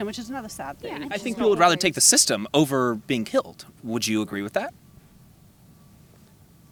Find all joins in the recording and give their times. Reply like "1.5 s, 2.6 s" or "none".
none